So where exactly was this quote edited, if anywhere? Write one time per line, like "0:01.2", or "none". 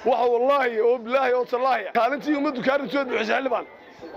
0:01.9